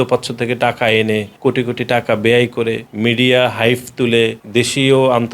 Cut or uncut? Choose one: cut